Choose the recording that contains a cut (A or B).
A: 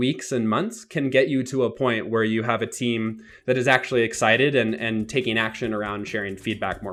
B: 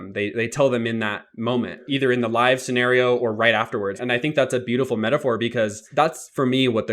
B